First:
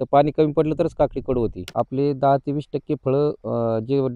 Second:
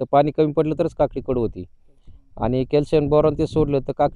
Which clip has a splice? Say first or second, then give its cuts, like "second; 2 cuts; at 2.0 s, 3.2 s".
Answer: first; 1 cut; at 1.6 s